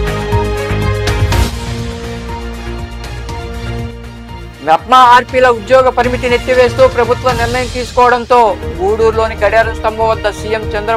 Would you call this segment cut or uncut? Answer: uncut